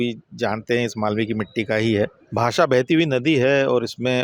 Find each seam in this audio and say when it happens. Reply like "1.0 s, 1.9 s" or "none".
2.2 s